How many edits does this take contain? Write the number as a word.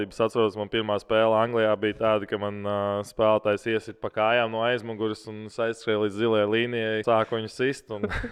one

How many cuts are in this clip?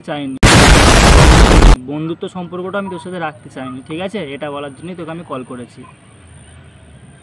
zero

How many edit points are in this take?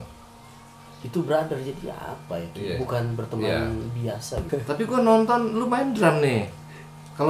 one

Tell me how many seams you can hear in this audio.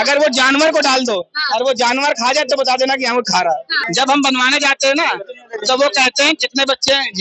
one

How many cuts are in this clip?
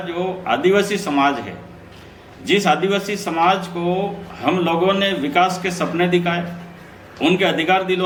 zero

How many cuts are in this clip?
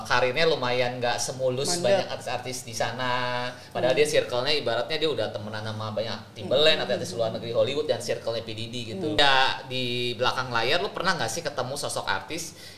one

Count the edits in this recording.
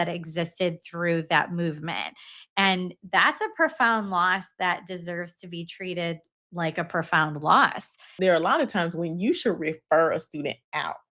one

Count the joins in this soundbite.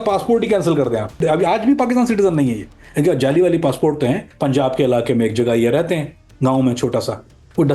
two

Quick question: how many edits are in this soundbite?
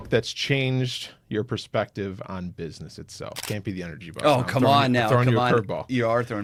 zero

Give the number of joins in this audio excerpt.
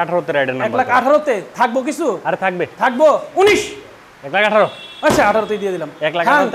zero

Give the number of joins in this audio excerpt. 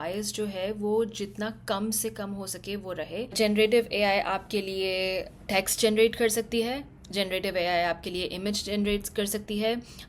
one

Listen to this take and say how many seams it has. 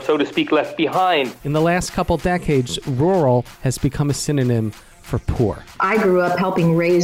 two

